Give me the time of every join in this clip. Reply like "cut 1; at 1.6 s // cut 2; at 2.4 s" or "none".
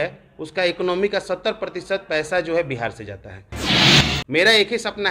cut 1; at 3.7 s